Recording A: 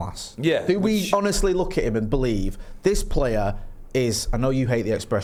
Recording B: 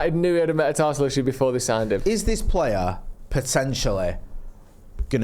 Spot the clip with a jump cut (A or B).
B